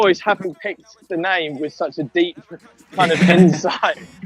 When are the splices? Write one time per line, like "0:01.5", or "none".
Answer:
none